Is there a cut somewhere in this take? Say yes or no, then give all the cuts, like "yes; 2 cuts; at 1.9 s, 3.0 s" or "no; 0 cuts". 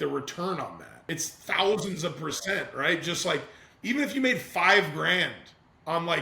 yes; 1 cut; at 1.4 s